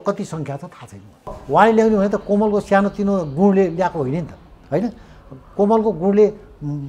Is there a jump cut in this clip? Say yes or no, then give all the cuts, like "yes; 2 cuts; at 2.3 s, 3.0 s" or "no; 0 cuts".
yes; 1 cut; at 1.4 s